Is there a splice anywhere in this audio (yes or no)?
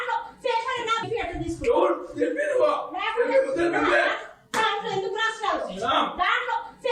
no